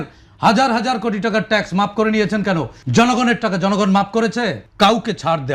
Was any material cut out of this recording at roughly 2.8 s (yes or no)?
yes